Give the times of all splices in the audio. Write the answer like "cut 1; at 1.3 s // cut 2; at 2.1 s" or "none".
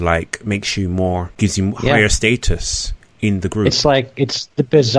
cut 1; at 1.3 s

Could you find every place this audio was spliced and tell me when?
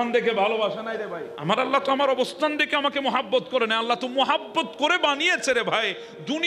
none

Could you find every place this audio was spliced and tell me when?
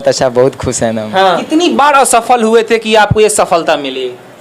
cut 1; at 1.4 s

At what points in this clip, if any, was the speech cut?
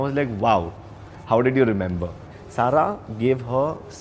cut 1; at 2.2 s

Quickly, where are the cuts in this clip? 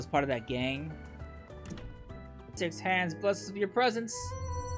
cut 1; at 2.5 s

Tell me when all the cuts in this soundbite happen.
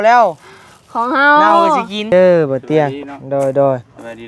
cut 1; at 2.1 s

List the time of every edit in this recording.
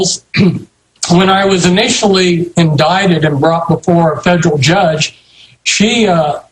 cut 1; at 1.1 s

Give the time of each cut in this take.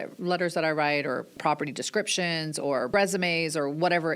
cut 1; at 1.3 s // cut 2; at 2.9 s

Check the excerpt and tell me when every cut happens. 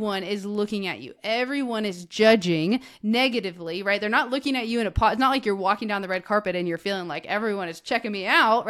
none

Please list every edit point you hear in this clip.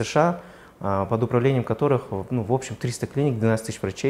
none

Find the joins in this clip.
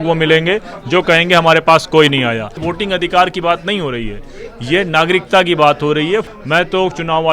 cut 1; at 2.6 s // cut 2; at 6.3 s

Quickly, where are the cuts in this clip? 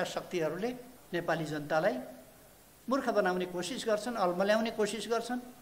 cut 1; at 0.9 s

